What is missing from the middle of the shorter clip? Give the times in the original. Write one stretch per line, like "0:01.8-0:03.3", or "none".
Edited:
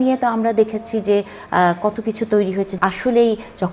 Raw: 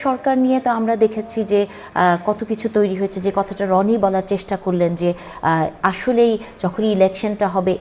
0:03.2-0:05.7

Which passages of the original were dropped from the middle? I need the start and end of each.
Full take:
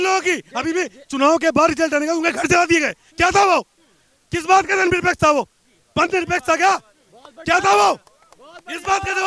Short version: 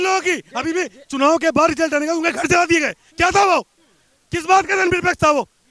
none

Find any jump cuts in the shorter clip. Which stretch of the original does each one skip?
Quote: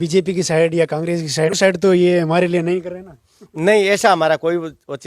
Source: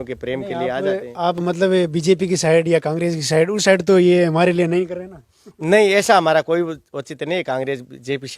0:03.5-0:03.6

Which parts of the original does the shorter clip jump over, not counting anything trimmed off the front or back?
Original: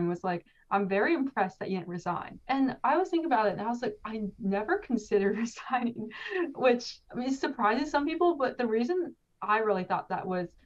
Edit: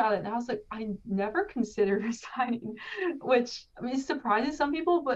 none

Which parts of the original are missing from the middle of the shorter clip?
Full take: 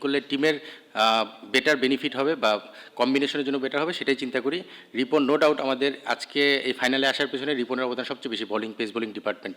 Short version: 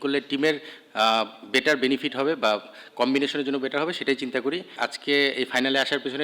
0:04.8-0:06.1

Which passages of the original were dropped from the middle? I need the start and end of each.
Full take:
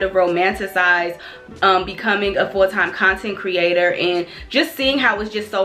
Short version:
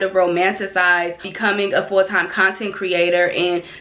0:01.3-0:01.9

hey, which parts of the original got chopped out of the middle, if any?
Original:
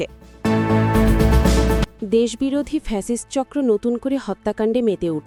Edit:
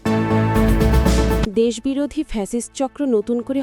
0:01.9-0:02.0

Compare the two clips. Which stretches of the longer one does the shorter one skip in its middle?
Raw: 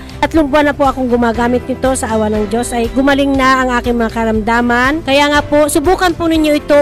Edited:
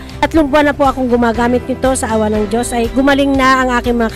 none

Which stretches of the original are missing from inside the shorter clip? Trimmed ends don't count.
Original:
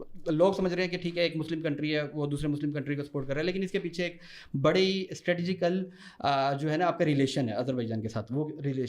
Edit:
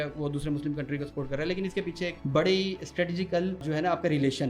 0:04.2-0:04.5
0:05.9-0:06.6

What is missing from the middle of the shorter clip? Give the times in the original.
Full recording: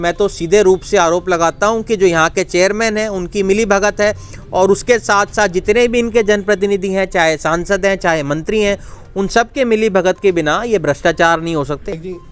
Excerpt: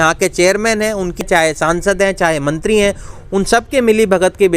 0:03.4-0:07.0

